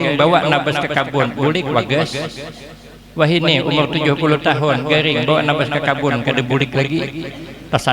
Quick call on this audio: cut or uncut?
uncut